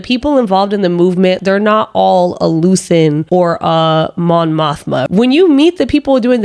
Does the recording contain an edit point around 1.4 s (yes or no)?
yes